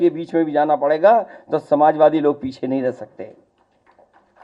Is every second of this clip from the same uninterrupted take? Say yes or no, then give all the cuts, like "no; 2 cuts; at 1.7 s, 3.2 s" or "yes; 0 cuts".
yes; 0 cuts